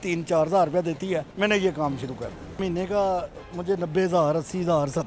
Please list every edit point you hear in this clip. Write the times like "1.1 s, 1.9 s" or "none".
1.3 s, 2.6 s